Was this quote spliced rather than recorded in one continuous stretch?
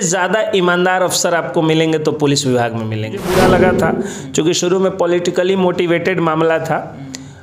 yes; 1 cut; at 3.3 s

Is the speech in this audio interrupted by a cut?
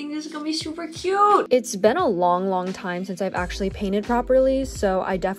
yes; 1 cut; at 1.5 s

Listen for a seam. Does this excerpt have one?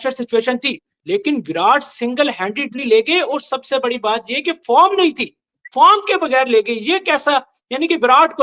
no; 0 cuts

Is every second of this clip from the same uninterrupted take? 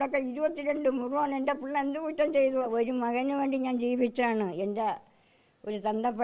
no; 1 cut; at 2.7 s

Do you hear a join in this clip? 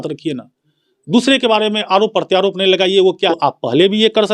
yes; 1 cut; at 3.3 s

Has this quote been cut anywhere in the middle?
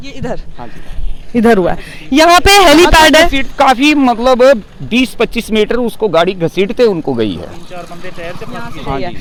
no; 0 cuts

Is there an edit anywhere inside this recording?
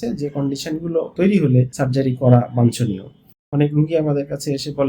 yes; 3 cuts; at 1.1 s, 1.7 s, 3.5 s

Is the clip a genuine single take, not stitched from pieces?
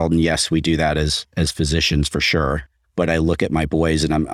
yes; 0 cuts

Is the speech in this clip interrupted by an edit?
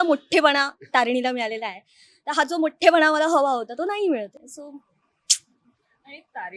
no; 0 cuts

